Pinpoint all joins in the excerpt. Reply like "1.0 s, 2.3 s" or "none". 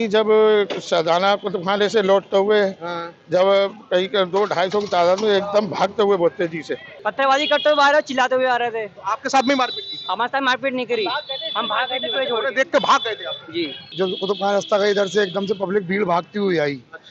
7.0 s, 13.8 s